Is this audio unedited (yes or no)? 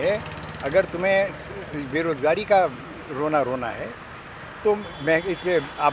yes